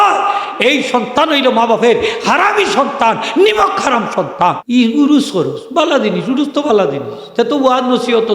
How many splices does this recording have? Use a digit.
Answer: 1